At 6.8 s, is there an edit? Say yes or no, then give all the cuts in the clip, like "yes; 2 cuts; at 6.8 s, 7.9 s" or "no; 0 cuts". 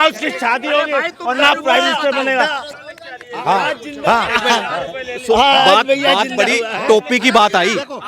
no; 1 cut; at 2.7 s